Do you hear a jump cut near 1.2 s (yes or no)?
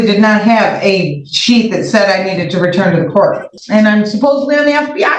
no